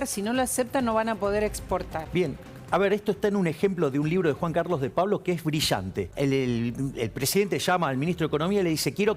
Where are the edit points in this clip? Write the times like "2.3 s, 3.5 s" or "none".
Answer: 2.0 s, 6.1 s